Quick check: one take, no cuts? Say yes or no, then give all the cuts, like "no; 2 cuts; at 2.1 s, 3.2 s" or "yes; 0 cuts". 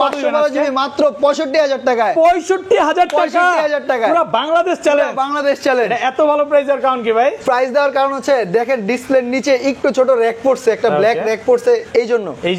yes; 0 cuts